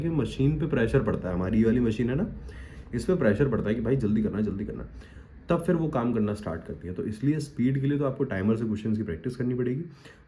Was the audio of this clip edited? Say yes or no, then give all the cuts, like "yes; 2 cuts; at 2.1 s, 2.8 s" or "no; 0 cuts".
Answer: no; 0 cuts